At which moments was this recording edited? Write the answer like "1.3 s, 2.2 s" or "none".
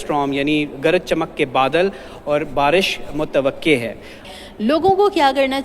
4.3 s